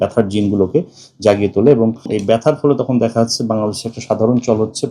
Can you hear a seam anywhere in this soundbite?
yes; 1 cut; at 2.1 s

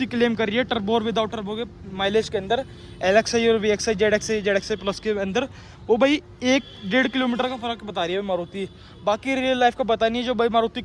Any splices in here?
no; 0 cuts

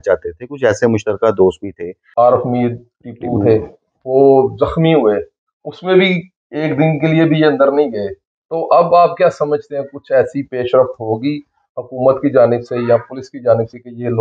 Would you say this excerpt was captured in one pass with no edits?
no; 1 cut; at 2.0 s

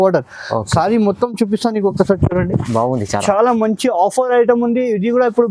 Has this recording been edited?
no; 0 cuts

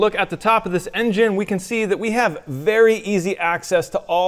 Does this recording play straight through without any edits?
yes; 0 cuts

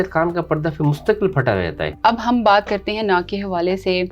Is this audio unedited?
yes; 0 cuts

